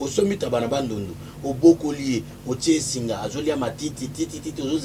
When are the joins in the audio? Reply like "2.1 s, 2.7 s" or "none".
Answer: none